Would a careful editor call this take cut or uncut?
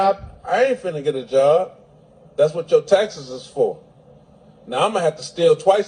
uncut